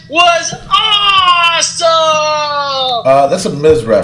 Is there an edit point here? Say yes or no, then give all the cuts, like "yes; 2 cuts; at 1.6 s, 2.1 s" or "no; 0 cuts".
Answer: no; 0 cuts